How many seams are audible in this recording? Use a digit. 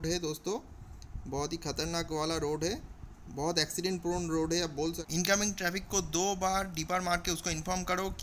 1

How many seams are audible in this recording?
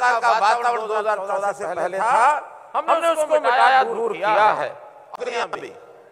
1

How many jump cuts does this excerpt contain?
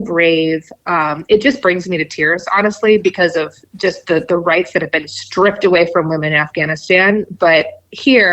0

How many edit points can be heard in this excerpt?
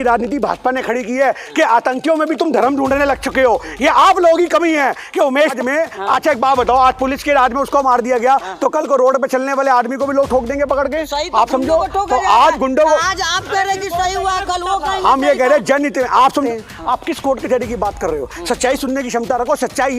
2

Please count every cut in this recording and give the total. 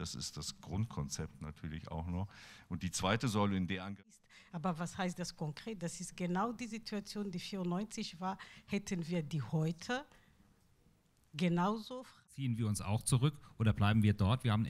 2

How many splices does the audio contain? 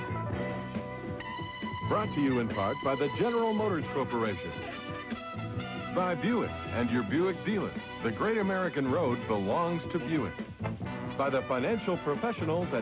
1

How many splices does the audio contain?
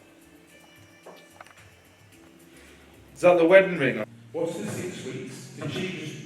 1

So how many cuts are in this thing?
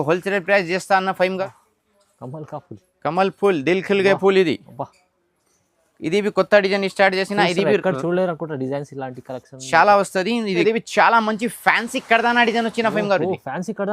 2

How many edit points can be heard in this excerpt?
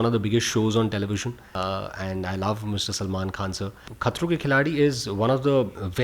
1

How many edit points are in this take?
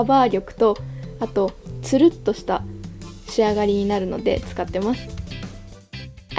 0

